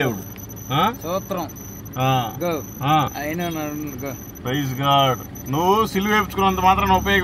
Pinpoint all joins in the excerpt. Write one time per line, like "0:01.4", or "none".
none